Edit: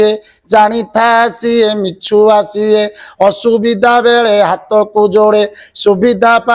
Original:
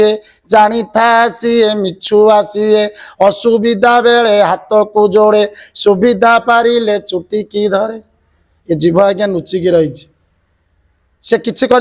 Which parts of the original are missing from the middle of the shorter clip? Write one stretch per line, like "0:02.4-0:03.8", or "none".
none